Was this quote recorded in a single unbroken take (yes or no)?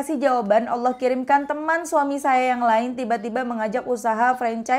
yes